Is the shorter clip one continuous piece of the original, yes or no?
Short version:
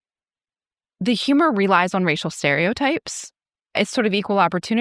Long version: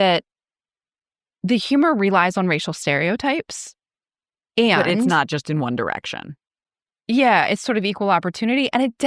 no